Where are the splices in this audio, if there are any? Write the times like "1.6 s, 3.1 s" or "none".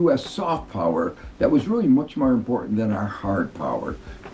none